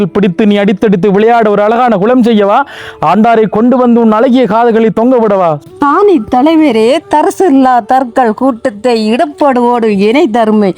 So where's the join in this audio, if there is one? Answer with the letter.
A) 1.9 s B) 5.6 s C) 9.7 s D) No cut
B